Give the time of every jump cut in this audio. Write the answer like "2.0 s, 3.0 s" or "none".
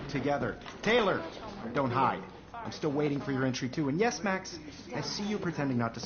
none